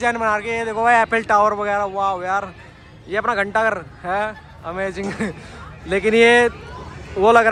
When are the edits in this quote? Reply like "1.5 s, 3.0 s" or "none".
none